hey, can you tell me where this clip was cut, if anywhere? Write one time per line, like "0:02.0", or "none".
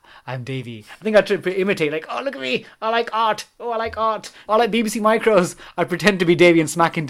0:00.9
0:04.4